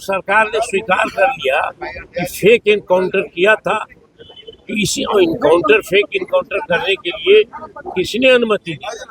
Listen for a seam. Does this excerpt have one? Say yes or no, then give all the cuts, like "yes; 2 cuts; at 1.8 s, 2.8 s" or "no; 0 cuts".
no; 0 cuts